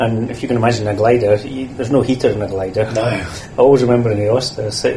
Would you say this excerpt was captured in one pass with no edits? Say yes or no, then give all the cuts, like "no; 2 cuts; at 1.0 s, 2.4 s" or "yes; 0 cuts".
no; 1 cut; at 3.4 s